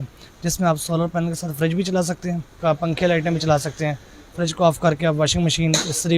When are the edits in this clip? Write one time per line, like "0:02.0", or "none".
0:02.6

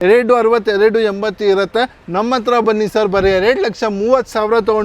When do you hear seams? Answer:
none

